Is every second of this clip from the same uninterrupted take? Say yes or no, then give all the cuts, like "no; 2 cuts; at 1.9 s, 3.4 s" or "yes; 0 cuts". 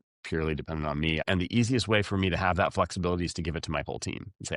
no; 1 cut; at 1.2 s